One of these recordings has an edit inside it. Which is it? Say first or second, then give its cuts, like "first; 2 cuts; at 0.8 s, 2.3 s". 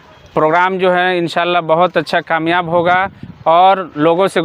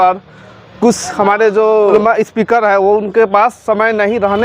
second; 1 cut; at 2.0 s